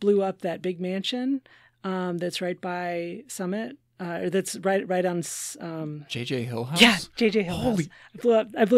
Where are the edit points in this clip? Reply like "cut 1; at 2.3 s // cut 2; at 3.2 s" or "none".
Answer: none